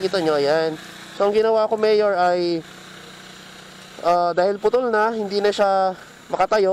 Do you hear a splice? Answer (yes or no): no